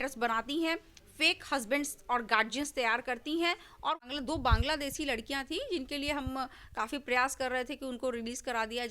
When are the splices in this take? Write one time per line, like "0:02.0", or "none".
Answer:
0:04.0